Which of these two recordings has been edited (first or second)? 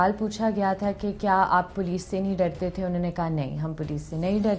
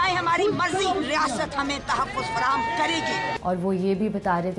second